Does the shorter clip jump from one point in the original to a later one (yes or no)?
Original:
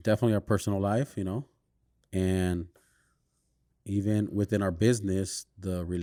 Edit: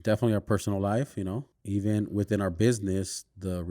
yes